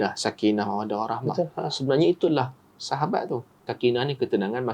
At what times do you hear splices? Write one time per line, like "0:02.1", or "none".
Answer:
0:03.7